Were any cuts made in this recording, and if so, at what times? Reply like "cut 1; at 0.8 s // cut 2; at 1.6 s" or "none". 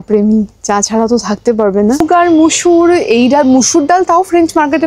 cut 1; at 2.0 s

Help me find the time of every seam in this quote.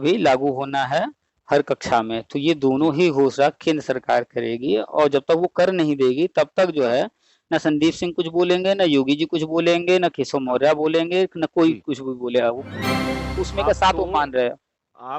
cut 1; at 13.2 s

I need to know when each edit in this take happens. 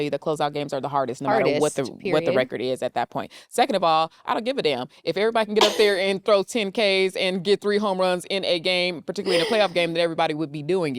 none

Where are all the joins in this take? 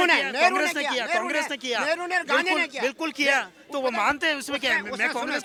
none

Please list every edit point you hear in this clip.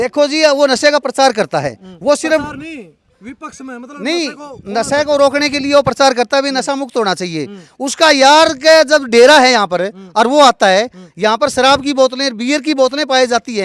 none

